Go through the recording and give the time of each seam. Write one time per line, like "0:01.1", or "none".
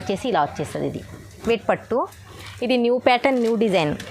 0:01.4